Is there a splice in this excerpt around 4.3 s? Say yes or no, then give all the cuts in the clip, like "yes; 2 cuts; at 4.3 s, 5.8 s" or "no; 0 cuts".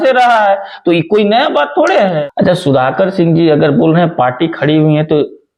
no; 1 cut; at 2.2 s